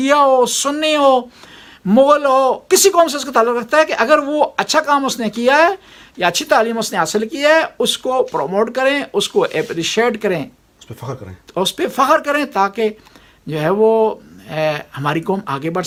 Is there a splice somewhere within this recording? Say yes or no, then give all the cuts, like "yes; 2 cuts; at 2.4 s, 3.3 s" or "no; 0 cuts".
no; 0 cuts